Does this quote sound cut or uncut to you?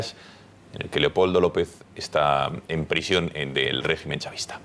cut